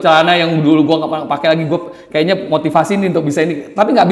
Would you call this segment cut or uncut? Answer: uncut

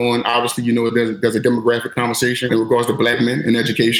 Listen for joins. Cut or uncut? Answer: cut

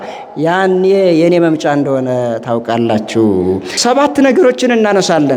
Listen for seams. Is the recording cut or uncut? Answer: cut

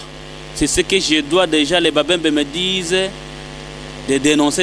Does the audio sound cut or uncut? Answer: uncut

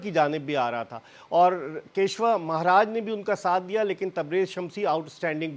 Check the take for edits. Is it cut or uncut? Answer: uncut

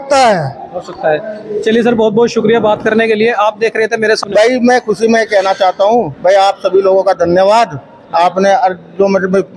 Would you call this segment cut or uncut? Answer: cut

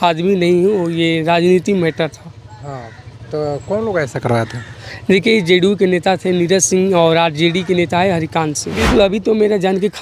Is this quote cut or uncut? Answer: cut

